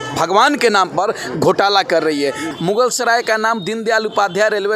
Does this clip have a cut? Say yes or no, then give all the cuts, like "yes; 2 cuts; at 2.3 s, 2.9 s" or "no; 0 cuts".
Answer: yes; 1 cut; at 2.5 s